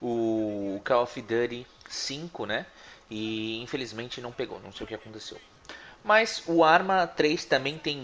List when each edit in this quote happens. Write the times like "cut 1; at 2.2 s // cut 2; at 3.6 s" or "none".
cut 1; at 3.2 s